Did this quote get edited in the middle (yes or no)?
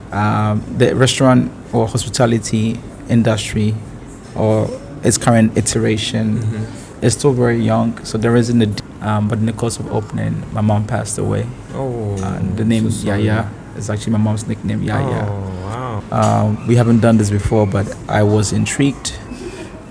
yes